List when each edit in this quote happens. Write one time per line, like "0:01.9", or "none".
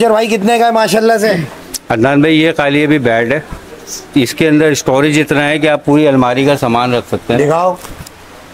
none